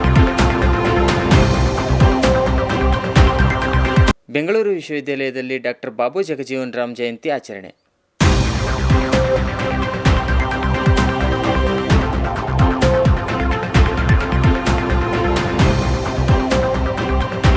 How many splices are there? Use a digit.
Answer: 0